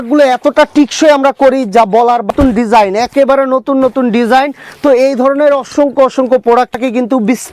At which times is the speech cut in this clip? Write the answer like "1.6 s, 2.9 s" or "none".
2.3 s, 6.8 s